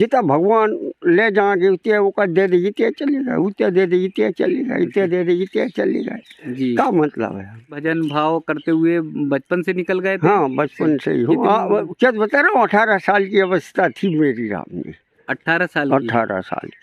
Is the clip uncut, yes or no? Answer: no